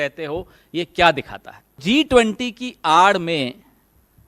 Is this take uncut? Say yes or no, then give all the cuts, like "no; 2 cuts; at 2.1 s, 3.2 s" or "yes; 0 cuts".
no; 1 cut; at 1.8 s